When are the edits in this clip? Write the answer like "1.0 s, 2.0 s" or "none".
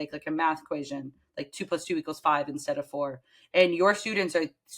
none